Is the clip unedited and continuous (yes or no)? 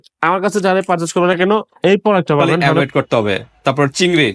no